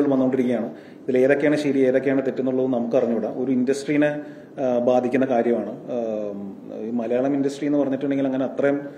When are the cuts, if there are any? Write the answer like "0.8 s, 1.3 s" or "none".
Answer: none

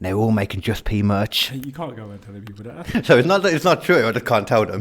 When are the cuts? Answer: 2.8 s

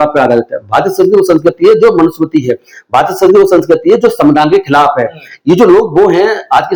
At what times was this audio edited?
none

